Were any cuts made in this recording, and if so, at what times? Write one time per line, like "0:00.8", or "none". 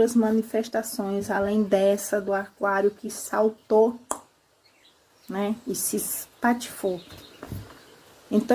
none

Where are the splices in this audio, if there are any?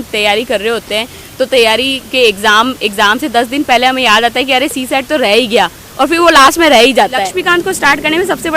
0:07.3

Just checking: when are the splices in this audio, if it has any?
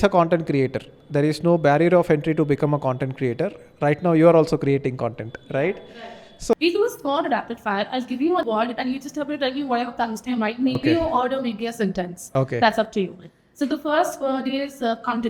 0:06.5
0:08.4

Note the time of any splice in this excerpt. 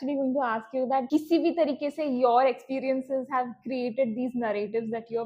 0:01.1

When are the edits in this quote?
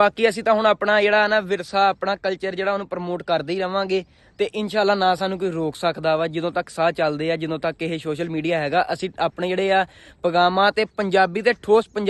none

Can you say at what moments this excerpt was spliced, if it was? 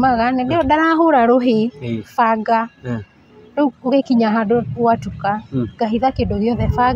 none

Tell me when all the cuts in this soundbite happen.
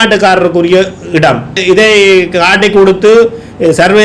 0:01.6

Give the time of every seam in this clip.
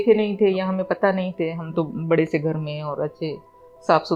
none

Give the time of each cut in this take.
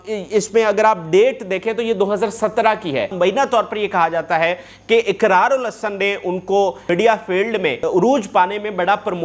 0:03.1
0:06.8
0:07.9

